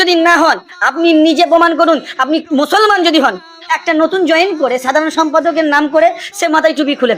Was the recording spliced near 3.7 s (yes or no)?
yes